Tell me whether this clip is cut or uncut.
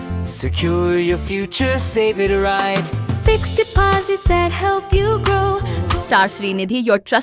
cut